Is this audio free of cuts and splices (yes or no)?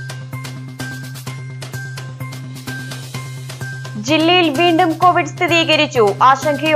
no